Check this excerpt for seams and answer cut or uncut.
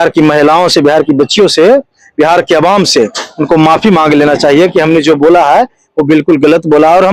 uncut